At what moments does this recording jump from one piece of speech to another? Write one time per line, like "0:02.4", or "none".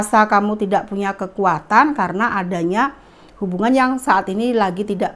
none